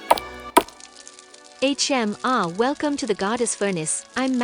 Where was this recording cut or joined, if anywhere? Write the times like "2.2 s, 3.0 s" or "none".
0.9 s